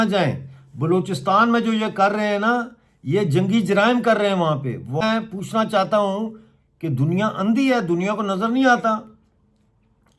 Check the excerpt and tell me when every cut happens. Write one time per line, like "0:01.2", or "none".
0:05.0